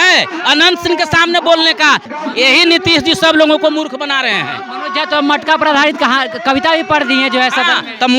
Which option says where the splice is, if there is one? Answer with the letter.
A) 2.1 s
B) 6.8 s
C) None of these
A